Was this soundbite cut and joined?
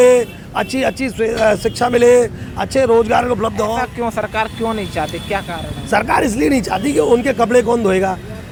no; 0 cuts

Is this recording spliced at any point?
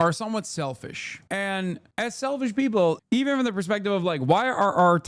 yes; 2 cuts; at 1.2 s, 3.0 s

